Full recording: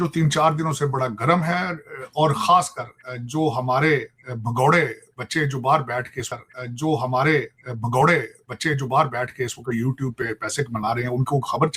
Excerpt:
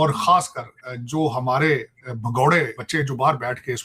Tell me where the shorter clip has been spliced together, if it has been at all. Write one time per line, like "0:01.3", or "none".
0:02.8